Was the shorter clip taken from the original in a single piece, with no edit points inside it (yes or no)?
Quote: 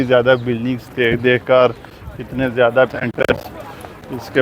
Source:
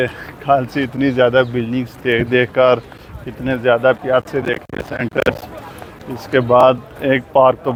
no